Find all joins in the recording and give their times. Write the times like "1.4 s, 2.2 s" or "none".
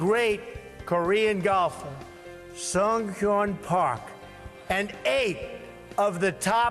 5.5 s